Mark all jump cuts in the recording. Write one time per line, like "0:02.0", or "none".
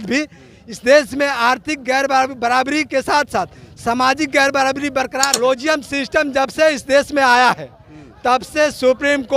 0:05.3